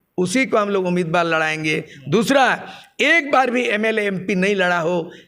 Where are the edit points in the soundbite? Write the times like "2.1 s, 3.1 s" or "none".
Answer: none